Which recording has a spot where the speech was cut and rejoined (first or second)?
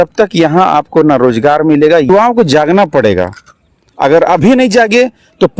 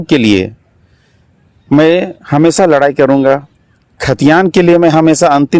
first